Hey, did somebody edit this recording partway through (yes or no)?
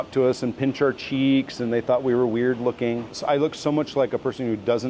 yes